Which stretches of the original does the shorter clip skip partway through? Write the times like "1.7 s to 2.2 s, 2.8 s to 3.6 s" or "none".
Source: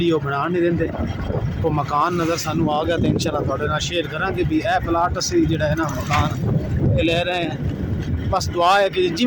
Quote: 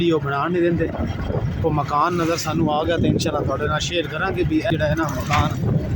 4.7 s to 5.5 s